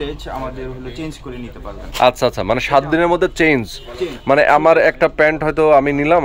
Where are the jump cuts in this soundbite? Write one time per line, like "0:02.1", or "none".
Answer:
none